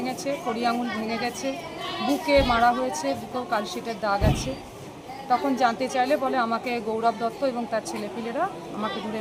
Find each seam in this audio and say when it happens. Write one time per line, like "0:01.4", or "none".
none